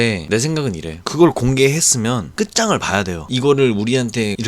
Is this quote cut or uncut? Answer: cut